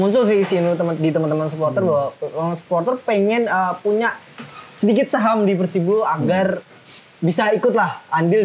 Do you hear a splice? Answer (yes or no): no